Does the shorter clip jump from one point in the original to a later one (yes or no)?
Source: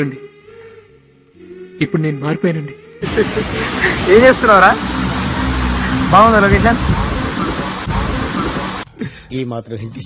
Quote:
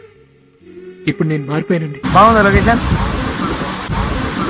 yes